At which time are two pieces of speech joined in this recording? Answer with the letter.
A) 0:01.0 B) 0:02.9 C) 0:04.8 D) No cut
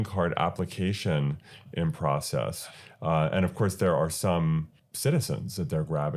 C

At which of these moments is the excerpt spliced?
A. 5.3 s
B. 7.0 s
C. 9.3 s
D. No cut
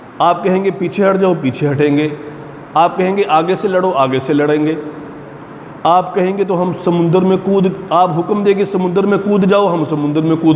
D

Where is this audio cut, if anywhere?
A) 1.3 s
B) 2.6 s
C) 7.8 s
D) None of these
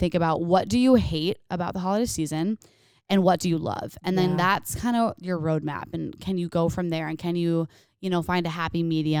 D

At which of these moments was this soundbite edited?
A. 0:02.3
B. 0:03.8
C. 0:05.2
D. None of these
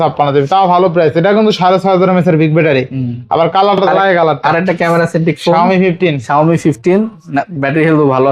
B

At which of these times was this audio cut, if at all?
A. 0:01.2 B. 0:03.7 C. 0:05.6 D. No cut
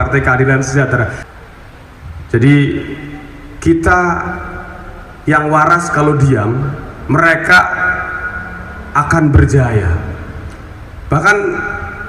A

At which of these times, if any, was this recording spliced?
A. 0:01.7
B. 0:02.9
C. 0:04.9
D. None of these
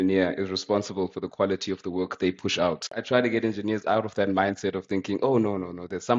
B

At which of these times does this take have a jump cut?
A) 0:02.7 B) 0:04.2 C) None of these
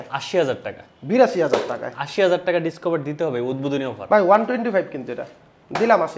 C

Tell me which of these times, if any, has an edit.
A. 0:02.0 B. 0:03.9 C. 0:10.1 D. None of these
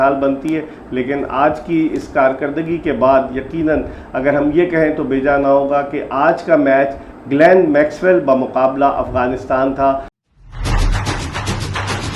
C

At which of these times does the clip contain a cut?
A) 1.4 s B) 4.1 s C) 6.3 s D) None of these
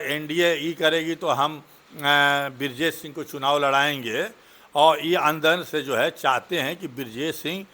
D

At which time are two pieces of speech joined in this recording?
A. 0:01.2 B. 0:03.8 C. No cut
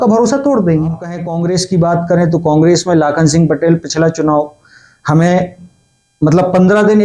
A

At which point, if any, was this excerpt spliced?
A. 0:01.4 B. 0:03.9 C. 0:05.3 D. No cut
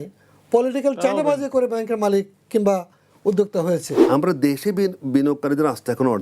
B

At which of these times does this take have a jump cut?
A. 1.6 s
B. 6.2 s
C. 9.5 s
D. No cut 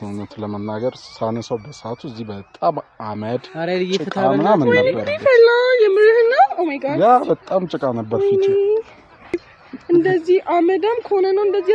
C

